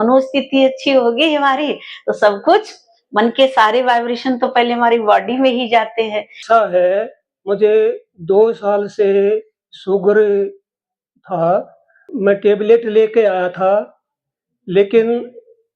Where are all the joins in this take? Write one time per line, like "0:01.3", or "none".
0:06.4
0:12.0